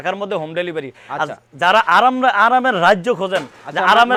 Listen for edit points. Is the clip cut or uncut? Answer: uncut